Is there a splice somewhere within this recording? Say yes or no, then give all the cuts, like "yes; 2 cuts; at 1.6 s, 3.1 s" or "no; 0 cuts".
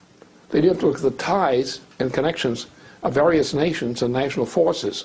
yes; 1 cut; at 1.2 s